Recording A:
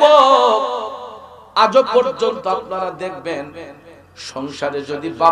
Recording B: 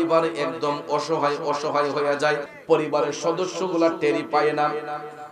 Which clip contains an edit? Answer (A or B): B